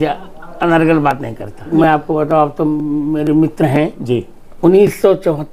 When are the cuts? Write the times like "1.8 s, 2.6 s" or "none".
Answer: 1.7 s, 4.4 s